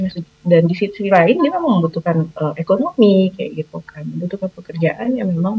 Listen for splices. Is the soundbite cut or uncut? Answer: uncut